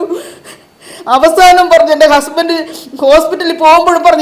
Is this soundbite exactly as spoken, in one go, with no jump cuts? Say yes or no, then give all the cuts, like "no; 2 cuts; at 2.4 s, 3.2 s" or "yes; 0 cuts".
yes; 0 cuts